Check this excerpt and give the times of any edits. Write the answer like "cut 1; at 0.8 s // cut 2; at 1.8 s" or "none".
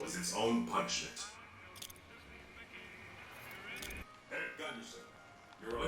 cut 1; at 4.0 s